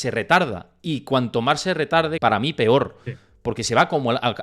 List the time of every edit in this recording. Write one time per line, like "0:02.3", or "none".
0:02.2

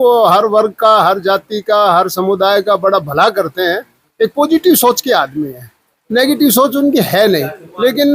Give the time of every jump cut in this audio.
none

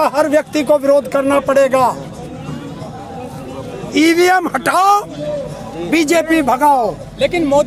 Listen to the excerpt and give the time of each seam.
none

